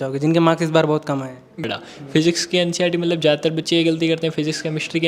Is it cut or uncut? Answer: cut